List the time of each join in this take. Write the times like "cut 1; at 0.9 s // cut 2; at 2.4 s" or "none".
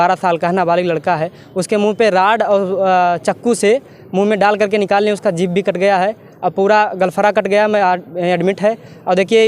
none

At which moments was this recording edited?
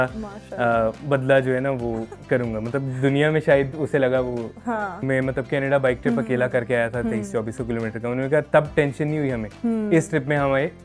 cut 1; at 4.9 s

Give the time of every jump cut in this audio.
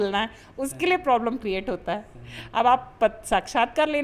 none

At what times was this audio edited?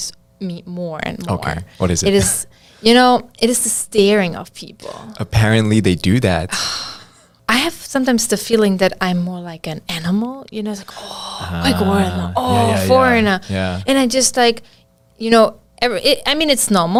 none

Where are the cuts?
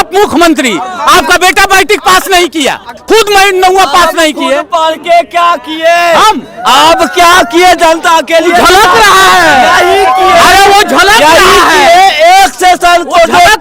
cut 1; at 2.9 s

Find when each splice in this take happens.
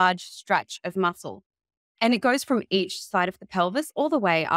none

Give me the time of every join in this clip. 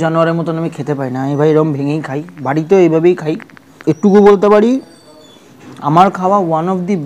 cut 1; at 4.0 s

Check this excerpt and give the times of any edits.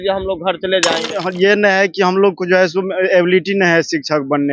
cut 1; at 1.1 s

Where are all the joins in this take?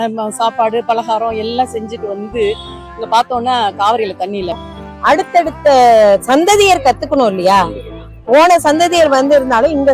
cut 1; at 4.6 s

